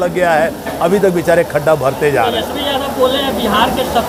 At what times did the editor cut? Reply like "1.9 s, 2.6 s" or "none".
none